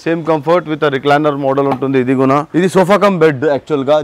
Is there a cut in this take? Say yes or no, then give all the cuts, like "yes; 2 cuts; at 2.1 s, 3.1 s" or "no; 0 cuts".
yes; 1 cut; at 2.5 s